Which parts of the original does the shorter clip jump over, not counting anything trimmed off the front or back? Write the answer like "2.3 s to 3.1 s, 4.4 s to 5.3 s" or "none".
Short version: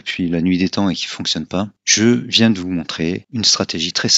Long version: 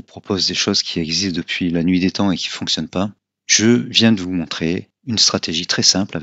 3.2 s to 3.4 s, 4.9 s to 5.0 s